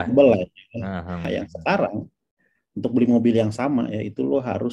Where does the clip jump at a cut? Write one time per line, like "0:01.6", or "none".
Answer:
0:01.3